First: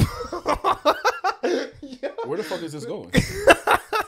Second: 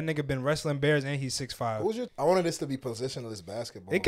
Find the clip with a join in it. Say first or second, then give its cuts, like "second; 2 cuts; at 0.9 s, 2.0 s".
second; 1 cut; at 2.1 s